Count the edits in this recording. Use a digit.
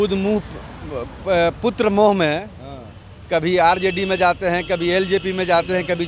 0